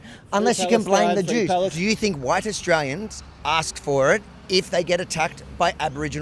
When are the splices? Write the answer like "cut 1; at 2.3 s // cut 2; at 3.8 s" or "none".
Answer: cut 1; at 1.7 s